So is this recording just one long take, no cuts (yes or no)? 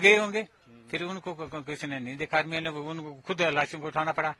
yes